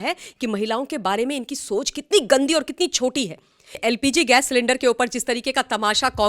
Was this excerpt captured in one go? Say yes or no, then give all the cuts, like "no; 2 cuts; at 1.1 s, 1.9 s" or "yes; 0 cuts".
no; 1 cut; at 3.8 s